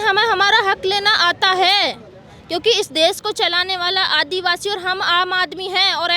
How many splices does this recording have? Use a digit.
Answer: 0